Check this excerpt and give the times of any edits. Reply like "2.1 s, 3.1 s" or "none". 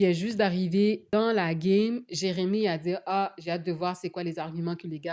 none